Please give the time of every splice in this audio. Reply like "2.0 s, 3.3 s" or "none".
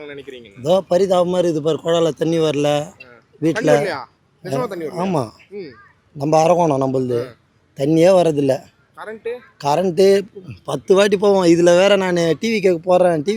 none

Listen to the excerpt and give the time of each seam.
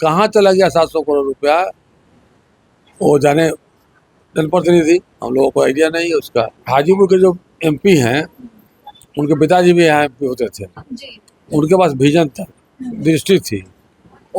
6.6 s

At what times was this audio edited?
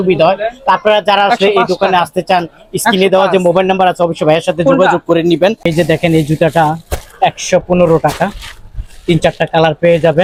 none

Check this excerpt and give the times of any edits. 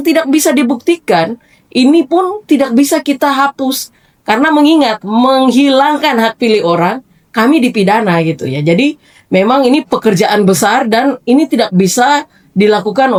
none

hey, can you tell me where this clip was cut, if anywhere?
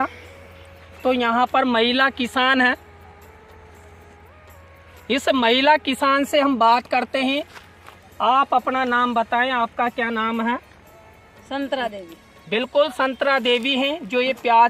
none

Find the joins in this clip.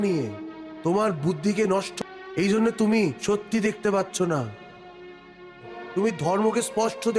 1.9 s, 5.8 s

